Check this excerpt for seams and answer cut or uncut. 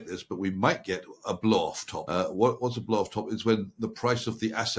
cut